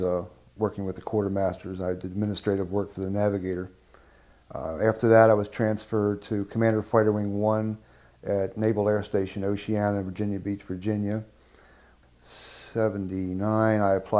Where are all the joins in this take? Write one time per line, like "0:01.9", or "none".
0:03.5